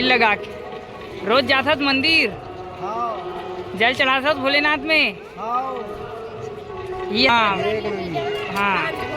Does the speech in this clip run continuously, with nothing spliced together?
no; 1 cut; at 7.3 s

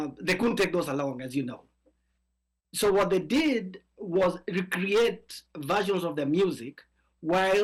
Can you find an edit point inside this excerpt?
no; 0 cuts

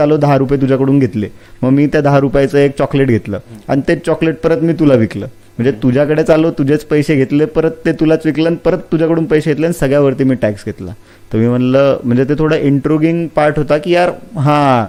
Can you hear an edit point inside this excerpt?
no; 0 cuts

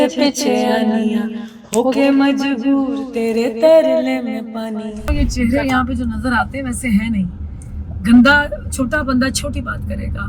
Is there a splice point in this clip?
yes; 1 cut; at 5.1 s

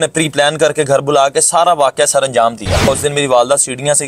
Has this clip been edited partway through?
yes; 1 cut; at 2.9 s

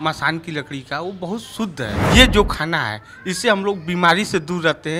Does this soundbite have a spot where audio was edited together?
yes; 1 cut; at 2.0 s

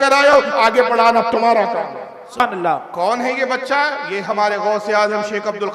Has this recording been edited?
yes; 1 cut; at 2.4 s

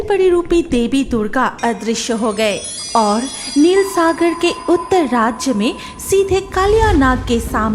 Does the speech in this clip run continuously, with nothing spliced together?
no; 1 cut; at 2.7 s

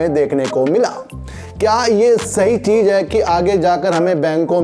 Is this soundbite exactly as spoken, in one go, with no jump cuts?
yes; 0 cuts

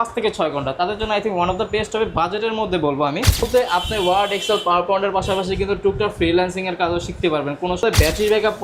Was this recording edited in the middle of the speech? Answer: yes; 2 cuts; at 3.5 s, 7.8 s

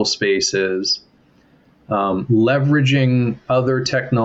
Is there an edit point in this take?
no; 0 cuts

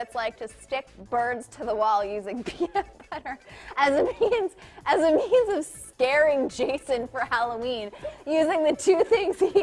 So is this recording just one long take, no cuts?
yes; 0 cuts

